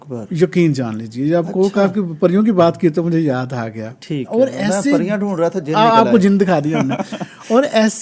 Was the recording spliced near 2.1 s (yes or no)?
no